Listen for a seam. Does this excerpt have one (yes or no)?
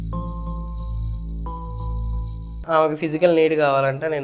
yes